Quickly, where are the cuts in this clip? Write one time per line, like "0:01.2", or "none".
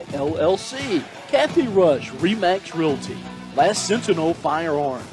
0:01.1